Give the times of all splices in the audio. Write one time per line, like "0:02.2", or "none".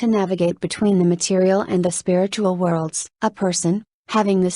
0:03.1